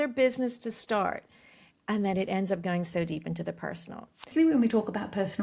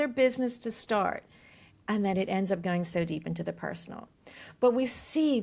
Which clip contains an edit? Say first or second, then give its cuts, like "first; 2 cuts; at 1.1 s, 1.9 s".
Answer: first; 1 cut; at 4.3 s